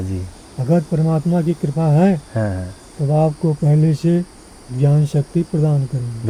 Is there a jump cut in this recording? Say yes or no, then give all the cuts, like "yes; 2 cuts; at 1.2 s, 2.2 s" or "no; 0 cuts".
no; 0 cuts